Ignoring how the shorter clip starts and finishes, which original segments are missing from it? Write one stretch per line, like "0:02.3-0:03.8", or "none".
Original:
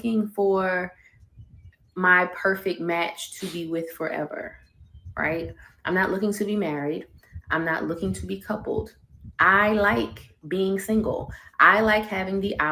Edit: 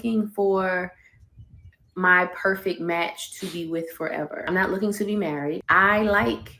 0:04.4-0:05.8
0:07.0-0:09.3